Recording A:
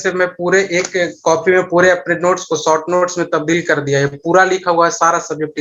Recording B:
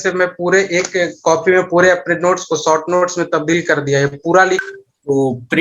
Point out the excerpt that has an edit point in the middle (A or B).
B